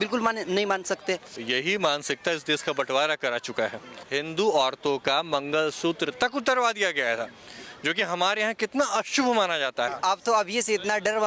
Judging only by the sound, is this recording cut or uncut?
cut